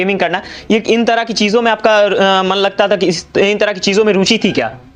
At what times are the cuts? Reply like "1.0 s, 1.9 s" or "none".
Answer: none